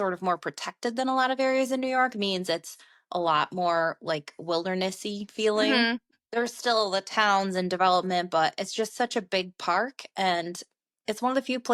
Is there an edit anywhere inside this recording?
no; 0 cuts

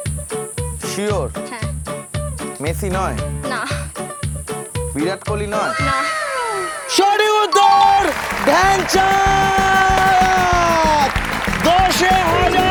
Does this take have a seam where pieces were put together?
no; 0 cuts

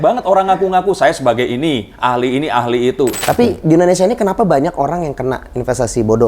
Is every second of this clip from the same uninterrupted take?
no; 1 cut; at 3.2 s

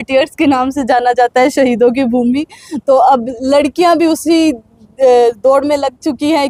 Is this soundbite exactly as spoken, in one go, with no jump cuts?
yes; 0 cuts

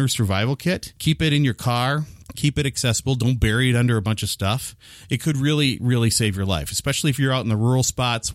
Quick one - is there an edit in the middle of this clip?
yes; 2 cuts; at 0.9 s, 2.2 s

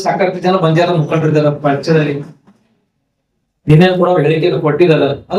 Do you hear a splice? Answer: yes; 1 cut; at 3.5 s

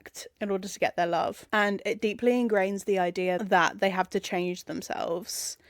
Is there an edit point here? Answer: yes; 1 cut; at 3.4 s

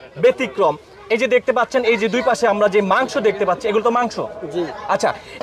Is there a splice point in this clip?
no; 0 cuts

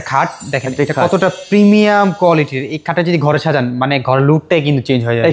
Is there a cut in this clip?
no; 0 cuts

